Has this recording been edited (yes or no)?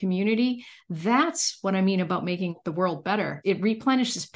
yes